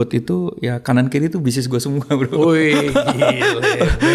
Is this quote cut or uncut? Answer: uncut